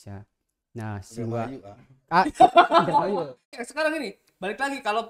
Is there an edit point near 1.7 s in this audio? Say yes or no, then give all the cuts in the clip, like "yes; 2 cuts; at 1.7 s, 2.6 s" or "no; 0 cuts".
no; 1 cut; at 3.6 s